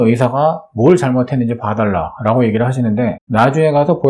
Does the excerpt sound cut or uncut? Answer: cut